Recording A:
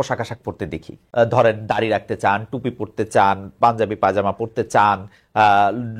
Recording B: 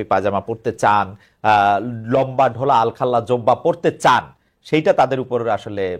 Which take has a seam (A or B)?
A